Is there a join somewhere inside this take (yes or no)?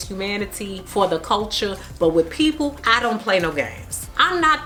no